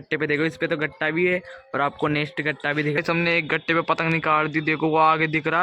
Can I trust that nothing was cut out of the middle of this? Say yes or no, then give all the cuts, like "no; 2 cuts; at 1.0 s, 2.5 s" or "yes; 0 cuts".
no; 1 cut; at 3.0 s